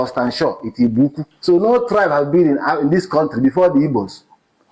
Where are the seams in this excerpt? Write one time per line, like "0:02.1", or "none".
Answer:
0:01.3